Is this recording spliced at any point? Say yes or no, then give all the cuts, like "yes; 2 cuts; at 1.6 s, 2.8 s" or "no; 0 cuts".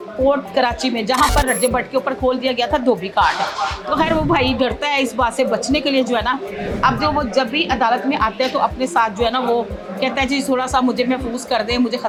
no; 0 cuts